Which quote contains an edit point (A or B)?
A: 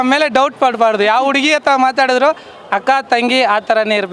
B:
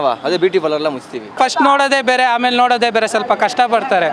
B